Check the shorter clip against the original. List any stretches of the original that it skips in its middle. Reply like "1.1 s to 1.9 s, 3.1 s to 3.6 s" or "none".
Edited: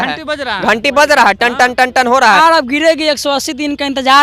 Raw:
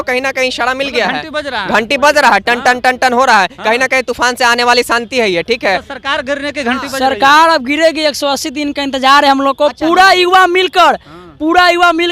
3.4 s to 7.3 s

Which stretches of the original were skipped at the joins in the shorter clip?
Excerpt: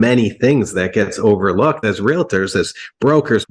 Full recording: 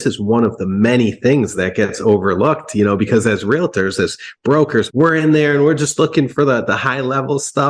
2.6 s to 3.3 s

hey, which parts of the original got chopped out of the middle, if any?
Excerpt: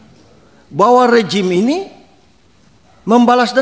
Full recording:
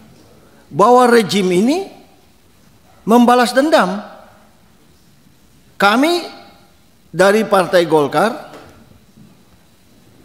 none

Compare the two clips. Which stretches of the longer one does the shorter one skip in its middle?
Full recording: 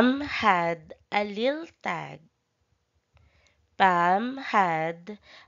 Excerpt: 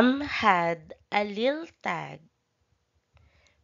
none

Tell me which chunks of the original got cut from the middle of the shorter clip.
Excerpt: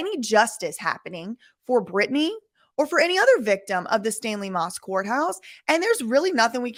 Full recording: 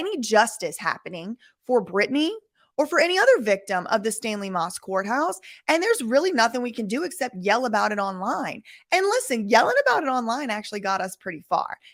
none

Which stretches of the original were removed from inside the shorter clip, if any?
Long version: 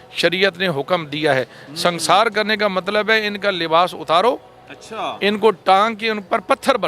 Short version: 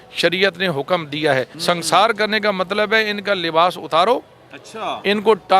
1.5 s to 1.7 s

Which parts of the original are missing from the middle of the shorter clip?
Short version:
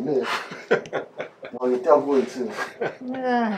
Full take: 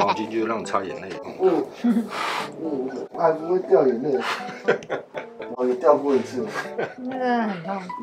none

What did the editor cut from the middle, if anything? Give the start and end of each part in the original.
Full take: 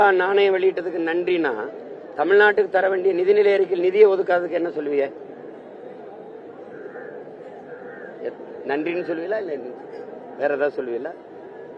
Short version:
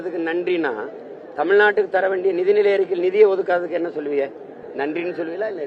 5.4 s to 8.5 s

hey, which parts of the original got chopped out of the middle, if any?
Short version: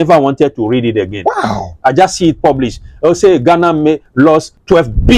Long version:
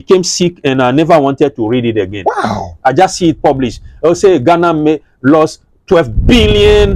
5.2 s to 5.4 s

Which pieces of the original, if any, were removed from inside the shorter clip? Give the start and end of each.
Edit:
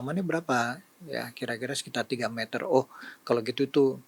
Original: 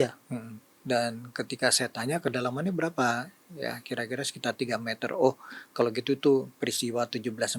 none

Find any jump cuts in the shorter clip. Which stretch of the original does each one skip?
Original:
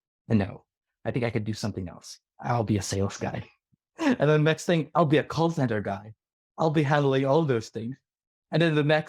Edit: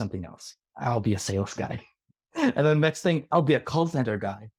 none

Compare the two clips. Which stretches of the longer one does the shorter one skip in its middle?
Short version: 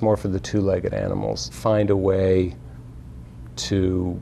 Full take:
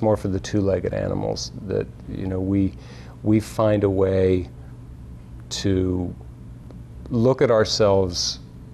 1.6 s to 3.5 s

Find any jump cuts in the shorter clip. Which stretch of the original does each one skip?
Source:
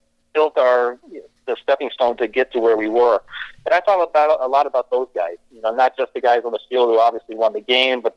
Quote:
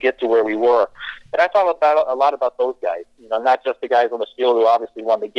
none

